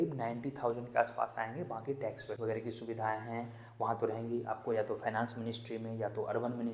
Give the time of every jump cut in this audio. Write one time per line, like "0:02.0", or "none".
0:02.3